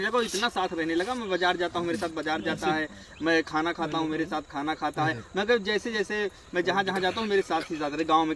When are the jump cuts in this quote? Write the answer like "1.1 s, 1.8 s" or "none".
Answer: none